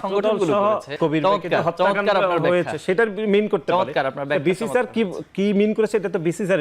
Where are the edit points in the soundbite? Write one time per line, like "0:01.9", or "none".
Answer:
0:00.9